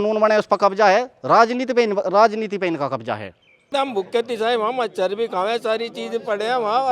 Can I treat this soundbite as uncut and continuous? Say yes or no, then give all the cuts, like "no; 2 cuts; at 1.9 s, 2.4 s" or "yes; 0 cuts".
no; 1 cut; at 3.7 s